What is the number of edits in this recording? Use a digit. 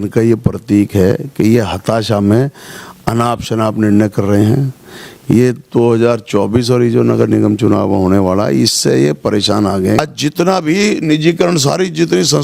1